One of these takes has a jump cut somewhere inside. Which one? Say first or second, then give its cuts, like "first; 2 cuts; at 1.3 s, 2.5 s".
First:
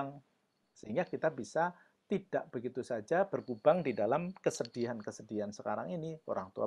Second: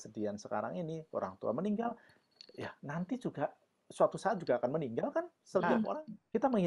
second; 1 cut; at 5.6 s